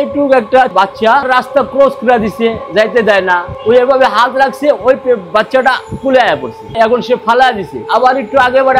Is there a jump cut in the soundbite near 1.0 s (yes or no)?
yes